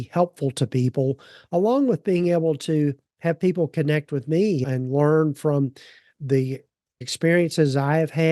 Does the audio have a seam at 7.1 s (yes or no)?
yes